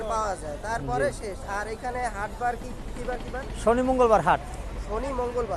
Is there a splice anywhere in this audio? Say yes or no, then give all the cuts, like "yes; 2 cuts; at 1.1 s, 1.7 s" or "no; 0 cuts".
no; 0 cuts